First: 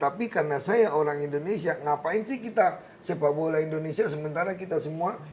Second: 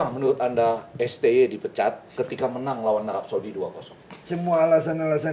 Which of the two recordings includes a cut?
second; 1 cut; at 4.2 s

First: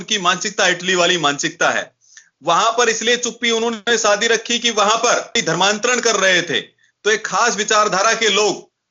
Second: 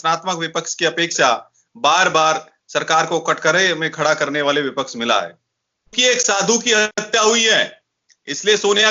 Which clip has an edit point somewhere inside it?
second; 1 cut; at 6.0 s

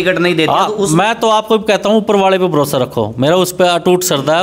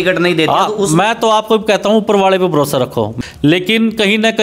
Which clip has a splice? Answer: second; 1 cut; at 3.1 s

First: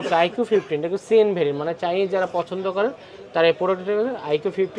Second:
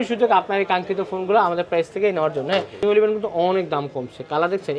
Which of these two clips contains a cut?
second; 1 cut; at 2.8 s

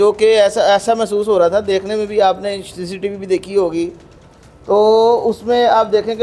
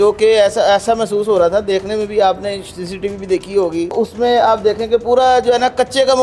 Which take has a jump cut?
second; 1 cut; at 3.9 s

